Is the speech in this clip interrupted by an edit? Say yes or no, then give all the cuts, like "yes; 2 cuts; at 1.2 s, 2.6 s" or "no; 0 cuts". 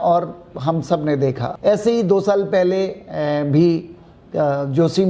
yes; 1 cut; at 1.5 s